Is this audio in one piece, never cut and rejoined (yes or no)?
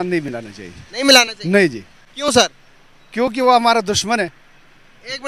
yes